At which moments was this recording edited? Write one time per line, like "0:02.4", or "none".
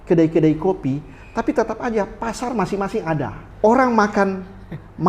0:03.4